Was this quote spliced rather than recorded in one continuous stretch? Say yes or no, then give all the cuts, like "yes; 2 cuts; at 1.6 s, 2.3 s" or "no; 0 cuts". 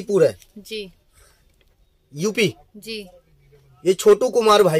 no; 0 cuts